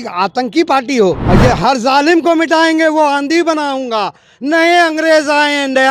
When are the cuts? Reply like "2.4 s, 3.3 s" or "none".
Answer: 1.2 s